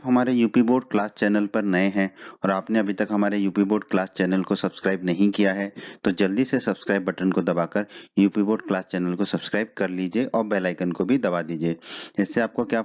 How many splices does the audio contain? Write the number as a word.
one